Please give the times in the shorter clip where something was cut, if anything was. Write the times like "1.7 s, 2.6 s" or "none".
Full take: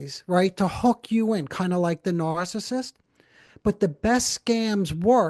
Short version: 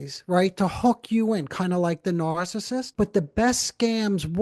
2.9 s